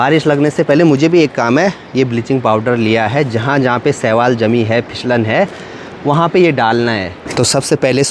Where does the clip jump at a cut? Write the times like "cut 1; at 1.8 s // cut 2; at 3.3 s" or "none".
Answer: none